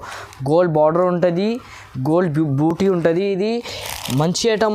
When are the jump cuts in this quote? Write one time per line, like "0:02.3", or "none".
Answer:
none